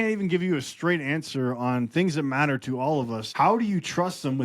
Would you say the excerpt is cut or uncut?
cut